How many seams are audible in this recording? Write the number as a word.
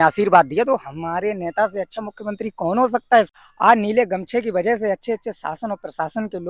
one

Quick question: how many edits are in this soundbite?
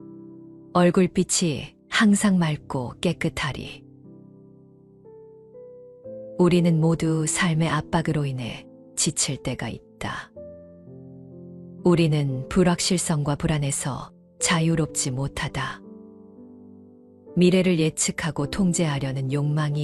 two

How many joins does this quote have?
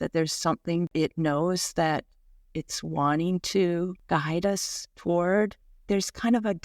three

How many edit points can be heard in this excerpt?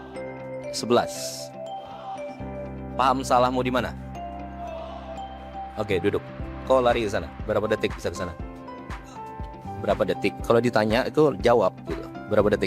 two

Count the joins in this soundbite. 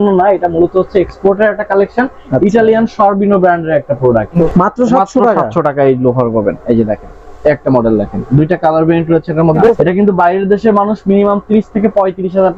two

